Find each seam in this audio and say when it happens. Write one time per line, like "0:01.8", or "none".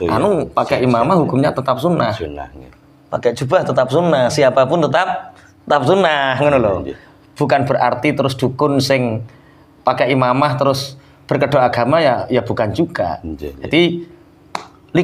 none